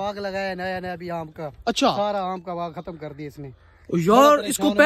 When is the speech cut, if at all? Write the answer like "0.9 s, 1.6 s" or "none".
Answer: none